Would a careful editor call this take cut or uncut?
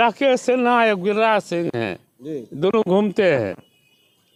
uncut